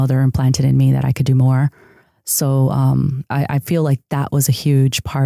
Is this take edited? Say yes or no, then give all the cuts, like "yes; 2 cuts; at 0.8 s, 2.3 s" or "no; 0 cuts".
yes; 1 cut; at 3.2 s